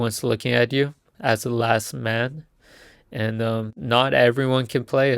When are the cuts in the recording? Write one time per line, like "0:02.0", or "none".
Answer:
0:01.1
0:03.7